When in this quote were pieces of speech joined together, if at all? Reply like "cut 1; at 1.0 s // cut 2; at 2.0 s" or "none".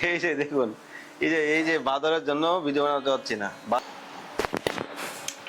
cut 1; at 3.8 s